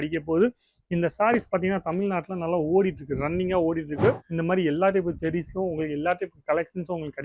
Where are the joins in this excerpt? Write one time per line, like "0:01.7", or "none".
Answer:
0:04.3